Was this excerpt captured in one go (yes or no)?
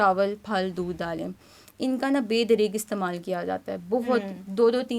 yes